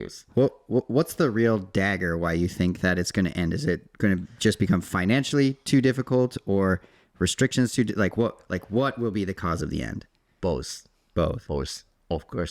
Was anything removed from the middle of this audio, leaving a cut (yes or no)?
no